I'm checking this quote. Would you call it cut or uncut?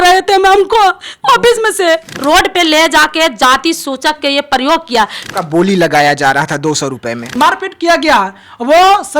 cut